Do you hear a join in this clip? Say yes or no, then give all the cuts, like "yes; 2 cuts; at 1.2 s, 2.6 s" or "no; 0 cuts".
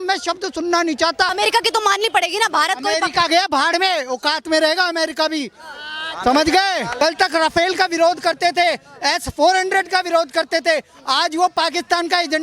yes; 2 cuts; at 1.3 s, 6.9 s